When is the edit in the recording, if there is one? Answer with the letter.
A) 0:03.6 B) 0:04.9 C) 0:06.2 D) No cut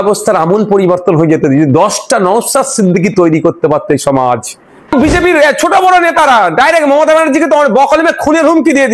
B